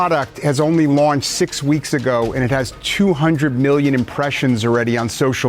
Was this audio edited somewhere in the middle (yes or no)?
no